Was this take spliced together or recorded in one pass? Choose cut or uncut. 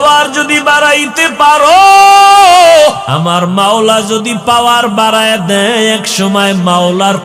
cut